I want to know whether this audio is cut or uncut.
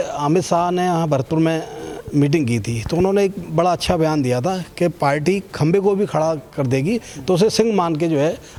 uncut